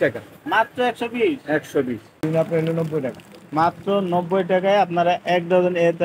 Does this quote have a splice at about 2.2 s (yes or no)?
yes